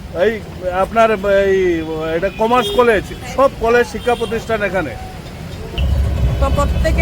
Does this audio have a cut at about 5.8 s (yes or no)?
yes